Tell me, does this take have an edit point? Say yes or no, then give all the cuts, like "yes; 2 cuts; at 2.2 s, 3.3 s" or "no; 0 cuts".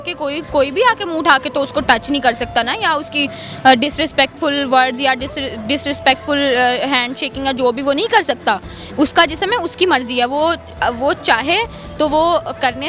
no; 0 cuts